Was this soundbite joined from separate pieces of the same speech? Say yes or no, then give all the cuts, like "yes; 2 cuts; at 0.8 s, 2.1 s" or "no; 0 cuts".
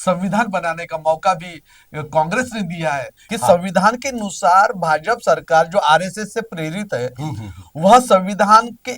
yes; 1 cut; at 3.2 s